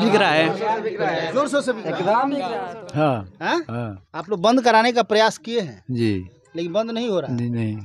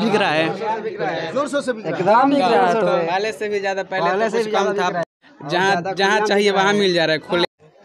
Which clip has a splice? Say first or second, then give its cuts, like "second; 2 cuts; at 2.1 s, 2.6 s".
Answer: first; 1 cut; at 2.6 s